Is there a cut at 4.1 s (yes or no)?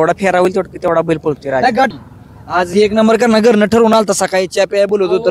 no